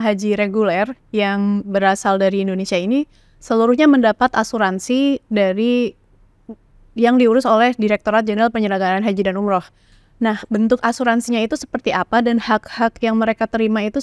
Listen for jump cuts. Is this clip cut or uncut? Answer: uncut